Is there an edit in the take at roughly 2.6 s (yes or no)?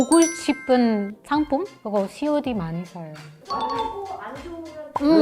no